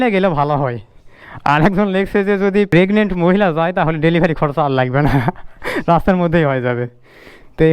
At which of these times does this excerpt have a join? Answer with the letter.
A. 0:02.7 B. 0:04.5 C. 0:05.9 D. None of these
A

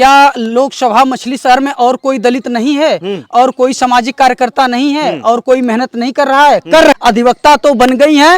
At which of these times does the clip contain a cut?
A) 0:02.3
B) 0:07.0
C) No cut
B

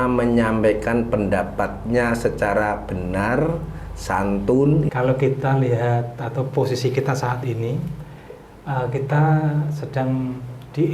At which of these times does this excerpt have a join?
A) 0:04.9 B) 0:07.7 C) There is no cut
A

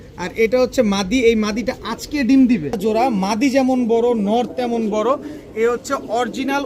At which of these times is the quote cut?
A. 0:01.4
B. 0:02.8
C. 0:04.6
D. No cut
B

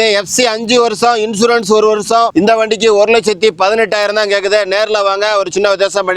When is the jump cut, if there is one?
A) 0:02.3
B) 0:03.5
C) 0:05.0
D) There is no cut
A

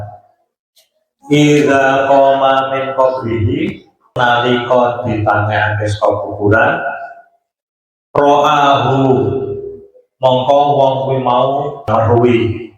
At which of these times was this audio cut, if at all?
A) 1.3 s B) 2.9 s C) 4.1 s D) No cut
C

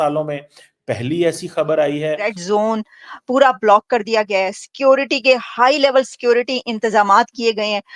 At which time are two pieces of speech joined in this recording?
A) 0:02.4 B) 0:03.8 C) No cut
A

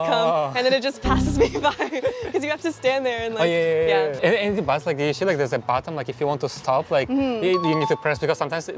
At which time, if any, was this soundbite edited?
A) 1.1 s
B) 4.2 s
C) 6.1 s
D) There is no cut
B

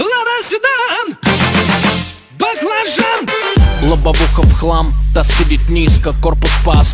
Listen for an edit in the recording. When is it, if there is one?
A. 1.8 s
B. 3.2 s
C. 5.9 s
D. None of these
B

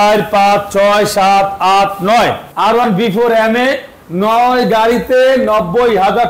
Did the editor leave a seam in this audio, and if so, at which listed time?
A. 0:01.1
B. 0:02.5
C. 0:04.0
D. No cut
B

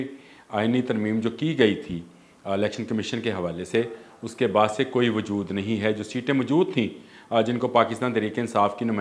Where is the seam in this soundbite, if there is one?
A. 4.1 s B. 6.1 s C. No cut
C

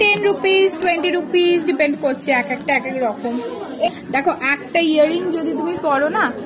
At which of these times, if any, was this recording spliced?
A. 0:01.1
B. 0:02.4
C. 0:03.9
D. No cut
C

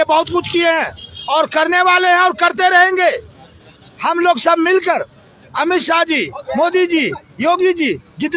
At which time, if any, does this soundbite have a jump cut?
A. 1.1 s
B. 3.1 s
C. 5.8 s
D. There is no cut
D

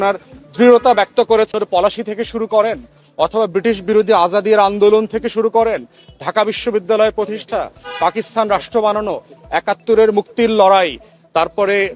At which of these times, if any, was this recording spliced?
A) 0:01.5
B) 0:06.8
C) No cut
A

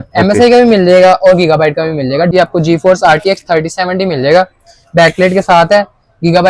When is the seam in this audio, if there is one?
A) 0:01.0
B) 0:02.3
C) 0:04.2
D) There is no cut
B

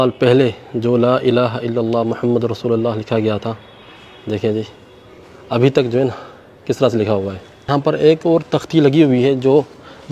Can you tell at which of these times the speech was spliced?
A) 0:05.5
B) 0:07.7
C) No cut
B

